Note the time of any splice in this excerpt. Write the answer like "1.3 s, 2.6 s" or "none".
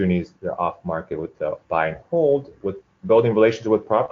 1.3 s